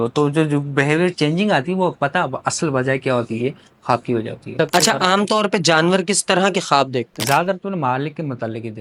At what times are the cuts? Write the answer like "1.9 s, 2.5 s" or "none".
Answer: 4.5 s

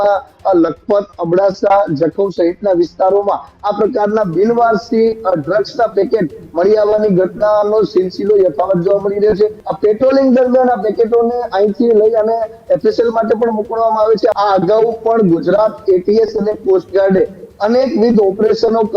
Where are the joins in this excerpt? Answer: 9.6 s, 14.3 s

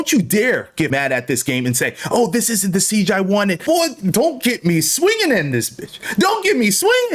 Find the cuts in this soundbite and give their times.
0.9 s, 3.6 s

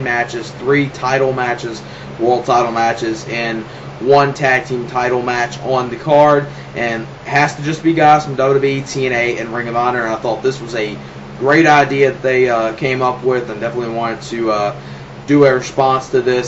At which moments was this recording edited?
14.0 s

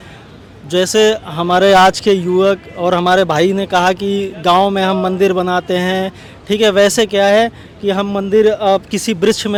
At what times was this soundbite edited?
none

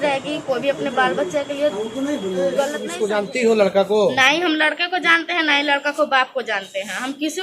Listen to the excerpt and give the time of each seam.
2.9 s

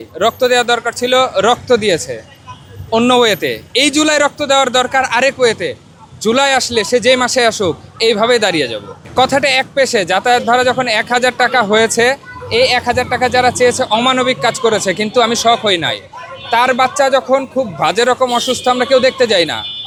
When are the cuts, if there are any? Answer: none

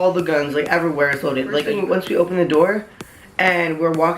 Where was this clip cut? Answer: 1.7 s

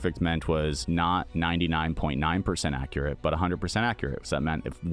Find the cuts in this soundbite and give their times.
1.1 s

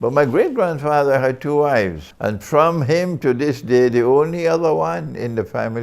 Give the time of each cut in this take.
2.1 s

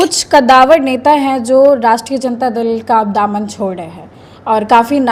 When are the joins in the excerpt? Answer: none

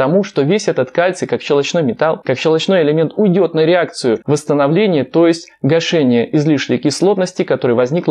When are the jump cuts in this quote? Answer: 2.2 s, 4.2 s

